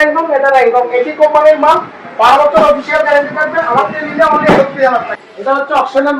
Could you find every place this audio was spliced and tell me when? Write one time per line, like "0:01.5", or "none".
0:05.1